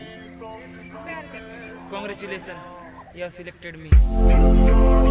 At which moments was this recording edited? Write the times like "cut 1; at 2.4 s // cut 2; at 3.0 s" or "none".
none

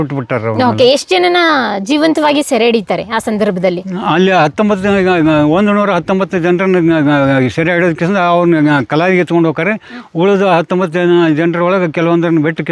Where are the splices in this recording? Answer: none

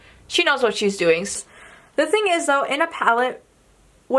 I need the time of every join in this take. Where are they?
cut 1; at 1.3 s

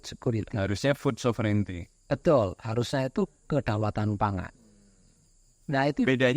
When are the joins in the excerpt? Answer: none

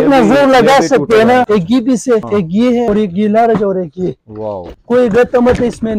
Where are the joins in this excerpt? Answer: cut 1; at 1.5 s // cut 2; at 2.8 s // cut 3; at 4.7 s

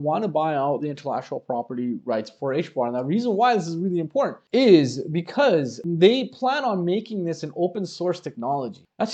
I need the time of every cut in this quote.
none

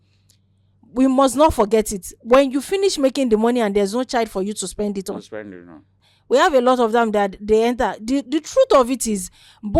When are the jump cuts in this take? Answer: cut 1; at 6.0 s

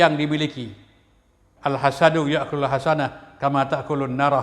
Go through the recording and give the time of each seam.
cut 1; at 1.4 s

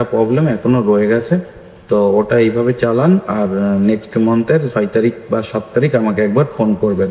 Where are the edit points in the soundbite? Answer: none

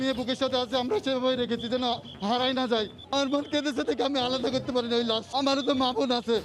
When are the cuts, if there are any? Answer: cut 1; at 3.0 s // cut 2; at 5.2 s

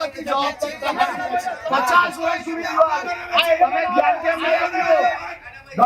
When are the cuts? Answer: cut 1; at 1.6 s

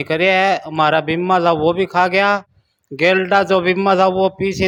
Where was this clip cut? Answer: none

